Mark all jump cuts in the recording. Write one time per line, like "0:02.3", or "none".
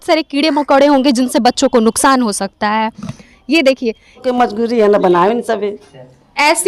0:04.2